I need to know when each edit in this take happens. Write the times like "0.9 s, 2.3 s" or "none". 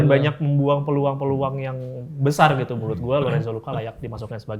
none